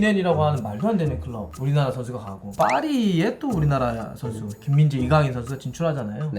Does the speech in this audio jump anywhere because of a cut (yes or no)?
yes